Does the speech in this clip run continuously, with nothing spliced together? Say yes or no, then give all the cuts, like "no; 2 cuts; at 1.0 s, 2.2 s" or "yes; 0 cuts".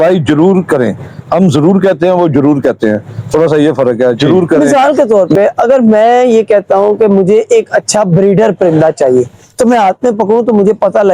no; 1 cut; at 4.6 s